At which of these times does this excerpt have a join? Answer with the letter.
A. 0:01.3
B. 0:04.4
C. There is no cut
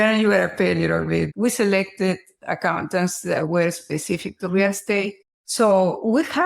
A